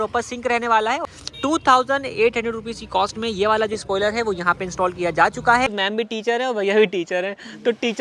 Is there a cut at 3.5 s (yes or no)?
no